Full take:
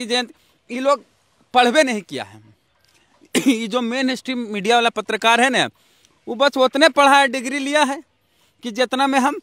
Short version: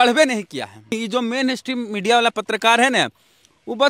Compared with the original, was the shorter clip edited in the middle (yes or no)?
yes